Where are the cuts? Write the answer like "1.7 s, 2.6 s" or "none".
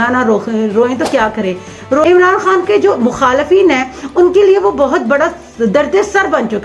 2.0 s